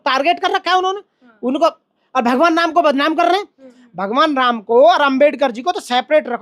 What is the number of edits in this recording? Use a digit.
1